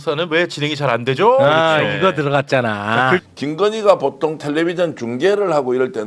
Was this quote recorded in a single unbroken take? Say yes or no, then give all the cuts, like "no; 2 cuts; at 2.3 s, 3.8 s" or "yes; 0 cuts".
no; 1 cut; at 3.2 s